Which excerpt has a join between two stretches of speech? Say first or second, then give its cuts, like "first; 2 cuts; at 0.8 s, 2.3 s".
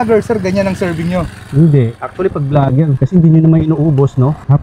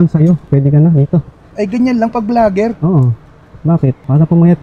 first; 1 cut; at 2.0 s